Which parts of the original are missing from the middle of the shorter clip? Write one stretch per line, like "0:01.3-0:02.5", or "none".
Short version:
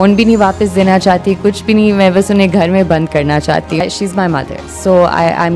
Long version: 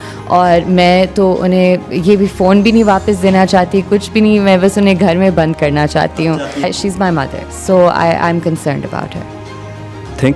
0:06.3-0:06.6

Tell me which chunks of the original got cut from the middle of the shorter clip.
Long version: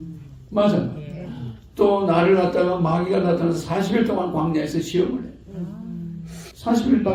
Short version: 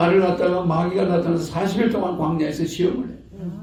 none

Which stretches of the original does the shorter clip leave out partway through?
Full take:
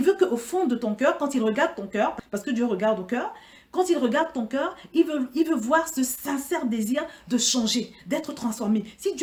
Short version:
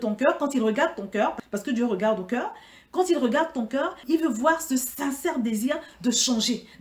0:04.8-0:05.3

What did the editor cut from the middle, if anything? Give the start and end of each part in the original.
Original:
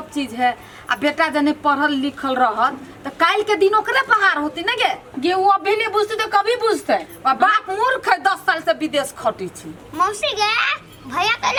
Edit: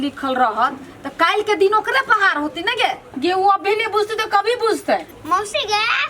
0:07.1-0:09.8

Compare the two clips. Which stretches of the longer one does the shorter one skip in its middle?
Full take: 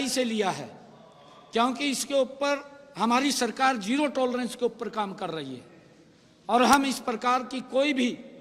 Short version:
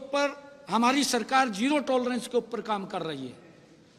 none

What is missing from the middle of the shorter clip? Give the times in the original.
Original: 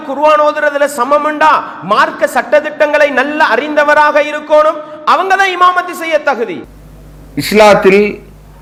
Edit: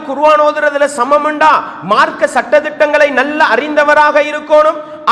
none

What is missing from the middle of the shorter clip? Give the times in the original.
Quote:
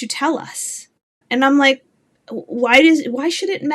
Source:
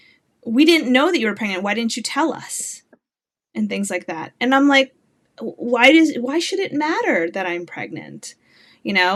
0:03.1-0:04.3

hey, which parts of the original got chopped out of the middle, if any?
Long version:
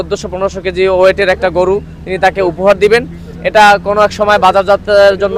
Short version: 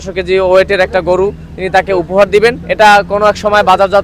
0:03.1-0:03.4

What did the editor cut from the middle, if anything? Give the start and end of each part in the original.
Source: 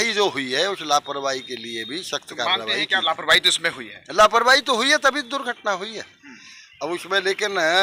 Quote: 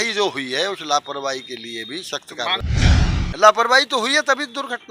0:02.9-0:03.6

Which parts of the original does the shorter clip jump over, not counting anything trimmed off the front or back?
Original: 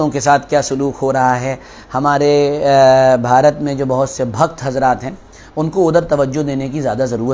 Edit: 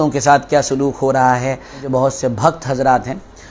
0:01.8-0:03.7

